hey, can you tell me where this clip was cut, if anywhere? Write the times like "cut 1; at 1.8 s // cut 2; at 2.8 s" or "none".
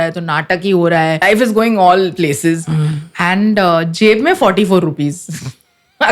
cut 1; at 1.2 s